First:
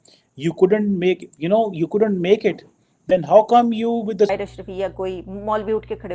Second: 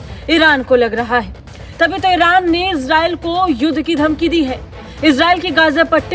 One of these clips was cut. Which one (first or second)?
first